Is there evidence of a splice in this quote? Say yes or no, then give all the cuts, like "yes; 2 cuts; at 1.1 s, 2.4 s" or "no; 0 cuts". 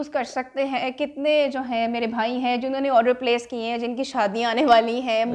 no; 0 cuts